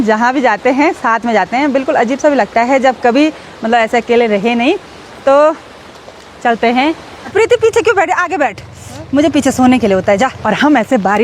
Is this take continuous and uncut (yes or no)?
no